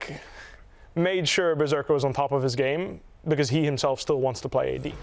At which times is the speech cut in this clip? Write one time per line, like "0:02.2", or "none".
none